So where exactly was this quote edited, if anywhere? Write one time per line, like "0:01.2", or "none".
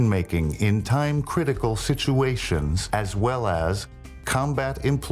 0:02.4